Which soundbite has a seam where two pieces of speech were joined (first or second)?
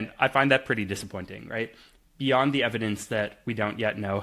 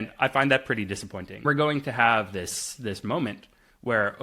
second